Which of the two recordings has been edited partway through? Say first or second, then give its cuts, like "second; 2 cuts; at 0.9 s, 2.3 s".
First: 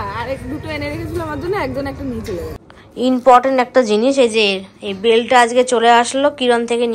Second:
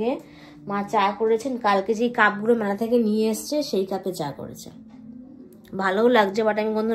first; 1 cut; at 2.5 s